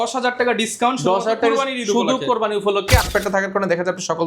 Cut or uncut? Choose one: cut